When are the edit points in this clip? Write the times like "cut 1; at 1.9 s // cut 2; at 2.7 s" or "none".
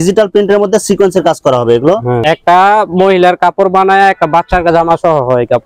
cut 1; at 2.2 s

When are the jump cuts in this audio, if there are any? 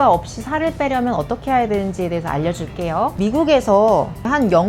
cut 1; at 3.1 s

